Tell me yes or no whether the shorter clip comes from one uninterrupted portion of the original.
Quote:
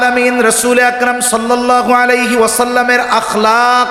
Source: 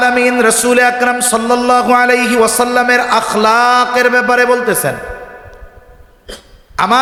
yes